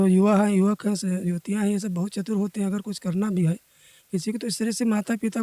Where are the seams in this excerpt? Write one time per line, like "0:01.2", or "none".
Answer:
none

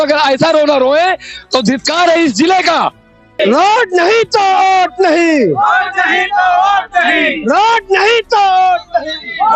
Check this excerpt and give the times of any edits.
0:03.4

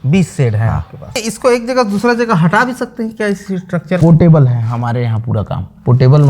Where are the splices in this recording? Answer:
0:01.3

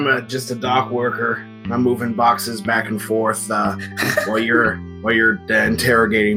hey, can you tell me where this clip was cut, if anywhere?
0:04.9

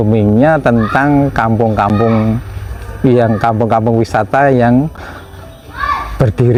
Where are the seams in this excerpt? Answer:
none

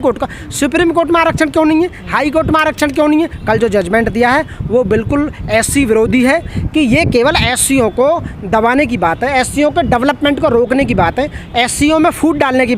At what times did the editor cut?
0:03.4
0:06.6

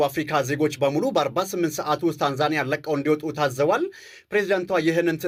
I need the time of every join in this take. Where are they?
none

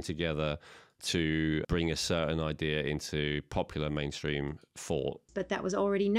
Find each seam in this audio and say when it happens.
0:01.7
0:05.3

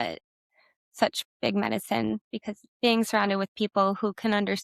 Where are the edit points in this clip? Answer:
none

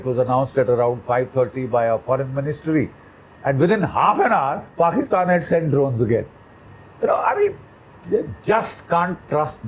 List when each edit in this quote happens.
none

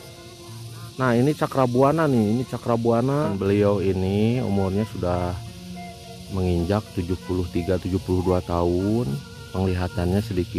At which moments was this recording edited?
0:03.4

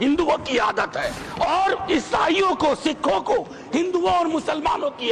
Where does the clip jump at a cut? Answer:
0:01.2

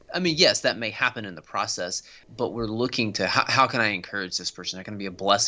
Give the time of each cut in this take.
0:02.2

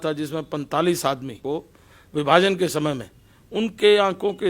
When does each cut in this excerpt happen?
0:01.4

